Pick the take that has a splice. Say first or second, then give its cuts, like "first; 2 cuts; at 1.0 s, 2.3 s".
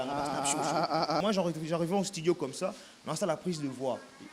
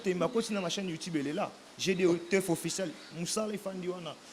first; 1 cut; at 1.2 s